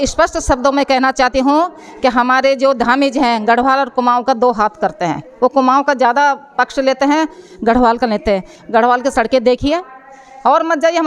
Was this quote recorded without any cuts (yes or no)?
yes